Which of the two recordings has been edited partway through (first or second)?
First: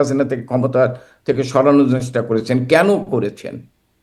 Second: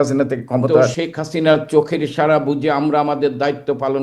second